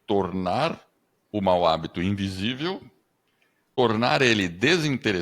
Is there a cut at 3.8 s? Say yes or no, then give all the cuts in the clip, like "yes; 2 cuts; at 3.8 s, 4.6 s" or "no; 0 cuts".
yes; 1 cut; at 3.8 s